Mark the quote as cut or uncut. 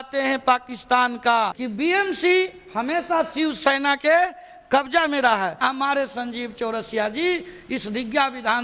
cut